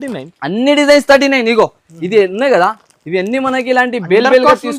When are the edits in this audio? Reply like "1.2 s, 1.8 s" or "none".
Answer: none